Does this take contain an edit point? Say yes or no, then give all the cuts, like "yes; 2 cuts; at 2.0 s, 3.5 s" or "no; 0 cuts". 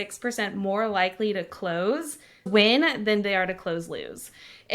yes; 1 cut; at 2.5 s